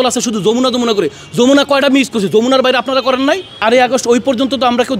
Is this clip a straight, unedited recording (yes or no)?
no